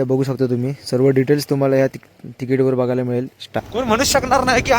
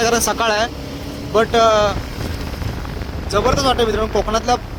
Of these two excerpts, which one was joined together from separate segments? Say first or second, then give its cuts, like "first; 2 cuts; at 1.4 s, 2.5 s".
first; 1 cut; at 3.4 s